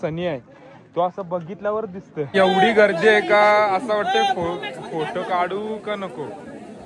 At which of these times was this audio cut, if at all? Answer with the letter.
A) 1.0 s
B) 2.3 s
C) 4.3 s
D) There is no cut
B